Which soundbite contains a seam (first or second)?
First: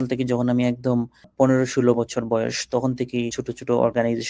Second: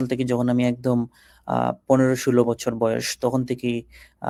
first